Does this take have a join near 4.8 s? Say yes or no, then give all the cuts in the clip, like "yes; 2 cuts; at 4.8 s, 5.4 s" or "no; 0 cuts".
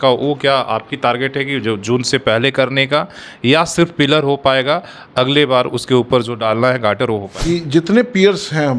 no; 1 cut; at 7.3 s